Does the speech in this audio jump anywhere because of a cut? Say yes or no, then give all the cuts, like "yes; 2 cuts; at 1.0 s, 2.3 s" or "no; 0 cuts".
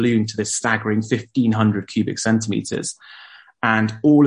no; 0 cuts